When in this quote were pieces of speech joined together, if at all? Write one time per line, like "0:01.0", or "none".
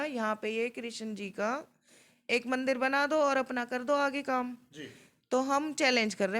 none